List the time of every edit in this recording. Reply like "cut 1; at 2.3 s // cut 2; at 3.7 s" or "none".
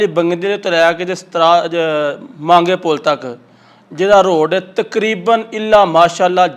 none